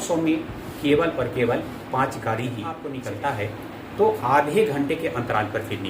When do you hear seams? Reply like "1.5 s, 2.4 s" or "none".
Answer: 2.9 s